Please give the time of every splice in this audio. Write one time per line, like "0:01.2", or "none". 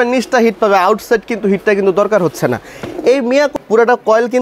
0:03.5